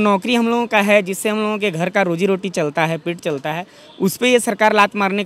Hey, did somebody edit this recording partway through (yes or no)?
no